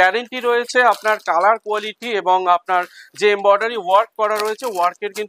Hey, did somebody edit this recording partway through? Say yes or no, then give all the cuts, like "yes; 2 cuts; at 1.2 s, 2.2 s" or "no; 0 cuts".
no; 0 cuts